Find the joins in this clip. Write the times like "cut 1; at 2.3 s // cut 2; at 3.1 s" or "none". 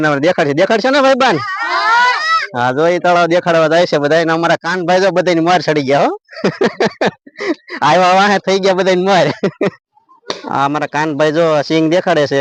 none